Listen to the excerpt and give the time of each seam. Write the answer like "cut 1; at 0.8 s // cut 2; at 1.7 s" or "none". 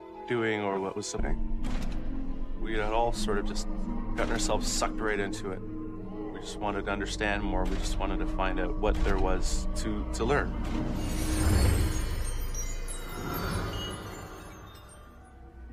none